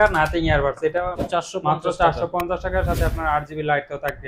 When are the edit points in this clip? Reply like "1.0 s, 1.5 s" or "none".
1.2 s

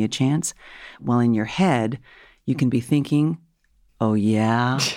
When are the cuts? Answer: 1.0 s

